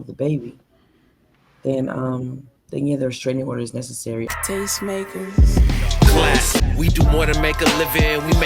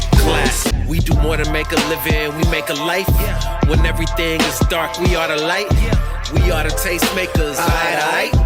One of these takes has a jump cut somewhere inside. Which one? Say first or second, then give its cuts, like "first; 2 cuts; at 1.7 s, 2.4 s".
first; 1 cut; at 4.3 s